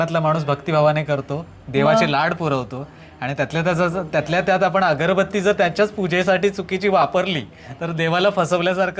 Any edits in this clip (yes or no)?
no